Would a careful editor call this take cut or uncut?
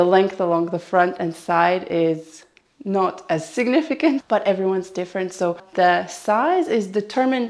cut